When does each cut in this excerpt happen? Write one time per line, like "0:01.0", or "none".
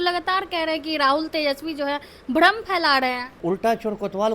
0:03.4